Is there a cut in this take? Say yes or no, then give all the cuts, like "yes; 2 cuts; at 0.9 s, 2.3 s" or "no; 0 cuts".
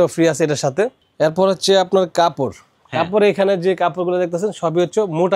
no; 0 cuts